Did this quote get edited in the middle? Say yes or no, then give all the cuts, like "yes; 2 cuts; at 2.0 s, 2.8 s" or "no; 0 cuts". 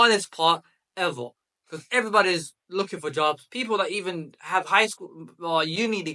no; 0 cuts